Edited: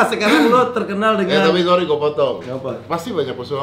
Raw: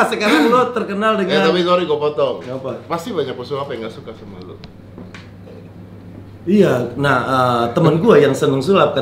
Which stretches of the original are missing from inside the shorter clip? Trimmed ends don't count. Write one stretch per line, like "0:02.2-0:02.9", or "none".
none